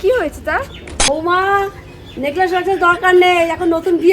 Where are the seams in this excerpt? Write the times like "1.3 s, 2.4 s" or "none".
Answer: 1.1 s